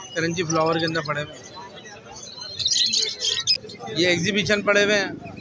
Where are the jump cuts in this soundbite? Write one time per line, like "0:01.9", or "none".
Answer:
0:03.6

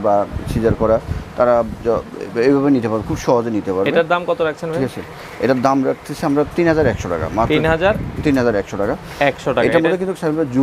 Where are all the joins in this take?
none

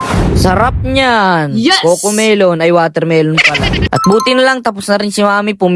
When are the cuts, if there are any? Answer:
0:03.8

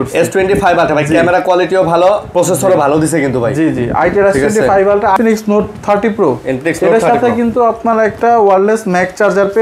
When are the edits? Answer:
0:05.2

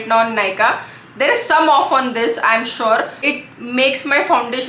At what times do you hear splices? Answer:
0:03.3

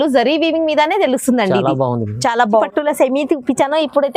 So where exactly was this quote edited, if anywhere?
0:02.6

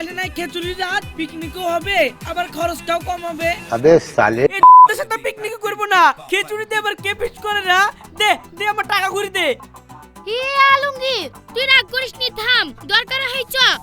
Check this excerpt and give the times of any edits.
none

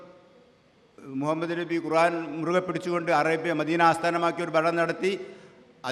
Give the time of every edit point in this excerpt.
none

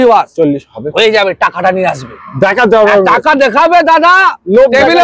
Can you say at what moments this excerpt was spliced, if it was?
none

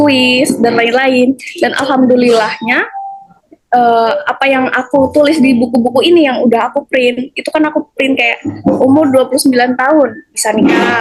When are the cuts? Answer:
none

